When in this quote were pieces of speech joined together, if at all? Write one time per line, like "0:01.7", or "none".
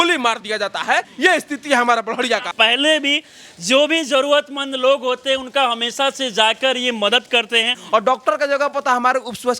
0:01.1
0:02.5
0:07.8